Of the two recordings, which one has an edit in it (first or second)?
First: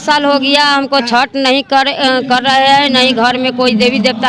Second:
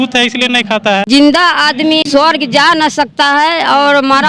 second